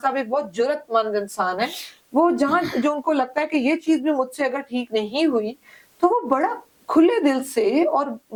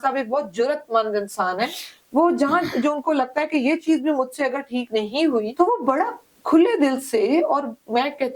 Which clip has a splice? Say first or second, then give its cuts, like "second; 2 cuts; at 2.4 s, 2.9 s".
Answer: second; 1 cut; at 5.5 s